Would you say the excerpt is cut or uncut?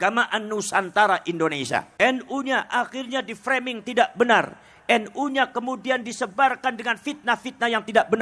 cut